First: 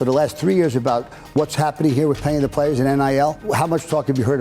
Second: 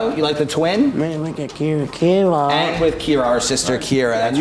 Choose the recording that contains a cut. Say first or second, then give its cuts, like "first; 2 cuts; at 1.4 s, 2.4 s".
first; 1 cut; at 3.4 s